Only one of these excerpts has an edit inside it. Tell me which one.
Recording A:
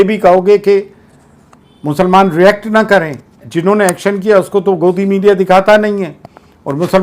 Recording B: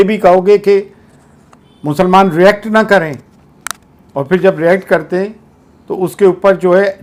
A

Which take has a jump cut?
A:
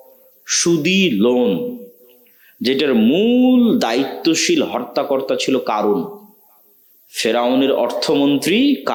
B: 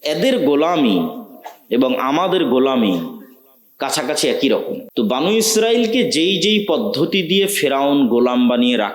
B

